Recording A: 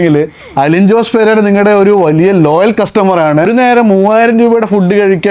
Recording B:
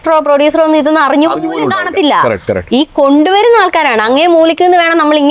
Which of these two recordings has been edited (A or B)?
A